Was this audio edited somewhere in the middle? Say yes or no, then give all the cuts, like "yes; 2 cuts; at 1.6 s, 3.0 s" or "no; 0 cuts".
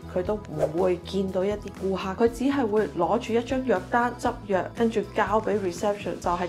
no; 0 cuts